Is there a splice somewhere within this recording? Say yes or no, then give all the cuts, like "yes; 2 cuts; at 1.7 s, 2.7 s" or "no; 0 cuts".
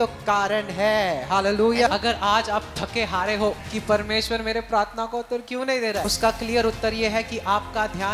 yes; 3 cuts; at 1.9 s, 3.7 s, 6.1 s